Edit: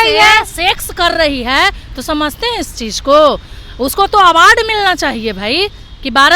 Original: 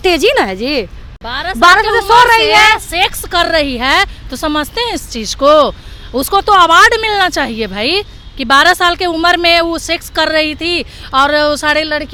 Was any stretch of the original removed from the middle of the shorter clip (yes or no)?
no